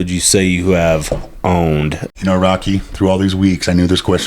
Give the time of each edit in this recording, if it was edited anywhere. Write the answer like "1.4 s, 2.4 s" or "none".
2.0 s